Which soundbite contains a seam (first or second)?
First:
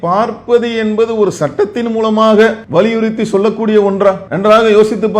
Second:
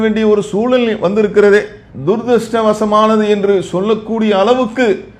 first